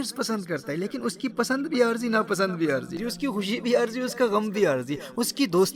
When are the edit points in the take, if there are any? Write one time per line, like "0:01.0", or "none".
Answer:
0:03.0